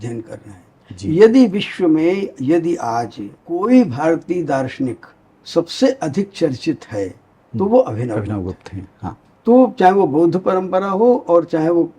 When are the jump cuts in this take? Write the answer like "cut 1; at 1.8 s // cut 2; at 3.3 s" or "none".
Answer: cut 1; at 3.6 s // cut 2; at 9.3 s

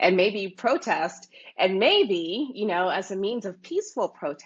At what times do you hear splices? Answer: none

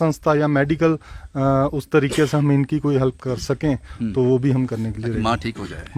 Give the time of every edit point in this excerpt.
none

